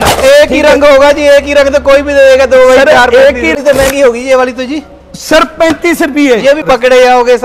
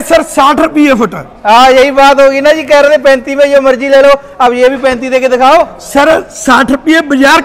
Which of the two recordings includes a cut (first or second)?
first